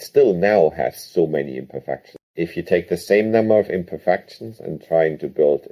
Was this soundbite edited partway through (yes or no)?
no